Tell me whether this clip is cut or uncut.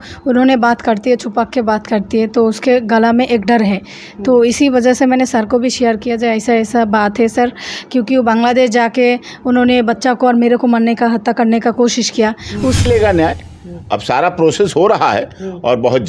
cut